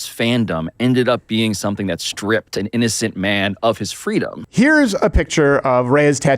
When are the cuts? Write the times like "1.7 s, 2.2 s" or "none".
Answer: 4.4 s